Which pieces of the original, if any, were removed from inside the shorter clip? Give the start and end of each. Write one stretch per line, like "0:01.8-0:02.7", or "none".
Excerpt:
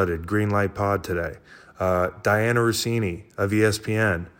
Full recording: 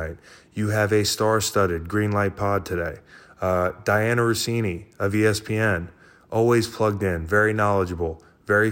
none